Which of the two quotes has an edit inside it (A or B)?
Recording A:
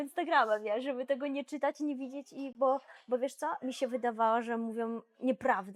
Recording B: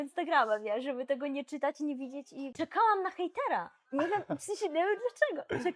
B